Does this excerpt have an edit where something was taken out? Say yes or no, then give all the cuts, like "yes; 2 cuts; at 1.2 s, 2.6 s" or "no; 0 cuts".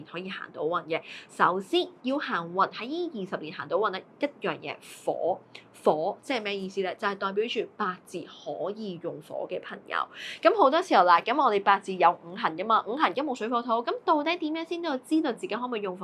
no; 0 cuts